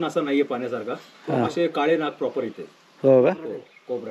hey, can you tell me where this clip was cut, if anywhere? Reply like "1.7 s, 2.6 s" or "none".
none